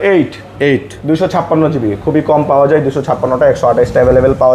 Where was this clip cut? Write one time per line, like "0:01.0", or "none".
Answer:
none